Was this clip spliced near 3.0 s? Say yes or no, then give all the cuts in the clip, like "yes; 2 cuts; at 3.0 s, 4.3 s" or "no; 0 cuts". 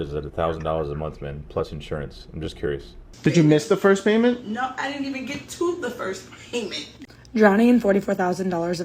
yes; 2 cuts; at 3.0 s, 6.8 s